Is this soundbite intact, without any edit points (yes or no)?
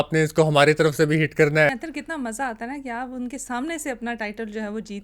no